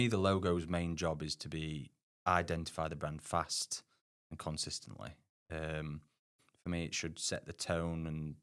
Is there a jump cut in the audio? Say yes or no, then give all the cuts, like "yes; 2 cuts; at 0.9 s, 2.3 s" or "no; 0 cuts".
no; 0 cuts